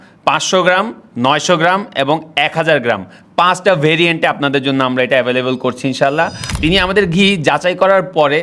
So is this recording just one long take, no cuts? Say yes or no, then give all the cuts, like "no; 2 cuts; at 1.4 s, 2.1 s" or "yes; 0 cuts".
no; 1 cut; at 6.4 s